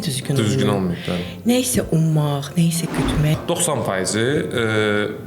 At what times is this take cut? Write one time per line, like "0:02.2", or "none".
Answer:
0:03.4